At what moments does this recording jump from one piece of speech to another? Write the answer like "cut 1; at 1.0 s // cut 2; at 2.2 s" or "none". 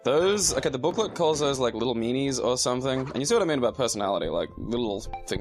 cut 1; at 1.5 s

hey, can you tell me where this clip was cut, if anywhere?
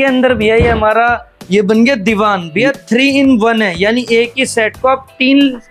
none

